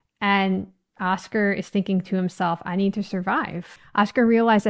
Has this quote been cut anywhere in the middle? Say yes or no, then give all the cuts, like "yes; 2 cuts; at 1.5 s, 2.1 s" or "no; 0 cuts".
yes; 1 cut; at 3.8 s